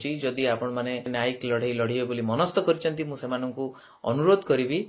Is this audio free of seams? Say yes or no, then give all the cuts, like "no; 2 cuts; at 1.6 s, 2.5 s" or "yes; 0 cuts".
no; 1 cut; at 1.1 s